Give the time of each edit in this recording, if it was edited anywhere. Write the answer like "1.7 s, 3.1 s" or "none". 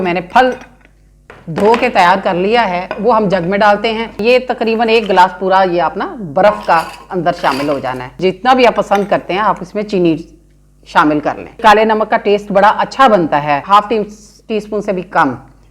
4.2 s, 8.2 s, 11.6 s, 13.6 s